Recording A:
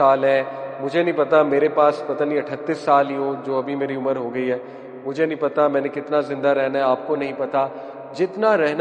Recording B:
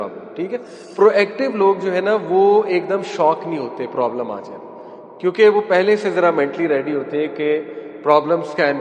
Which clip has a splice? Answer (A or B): B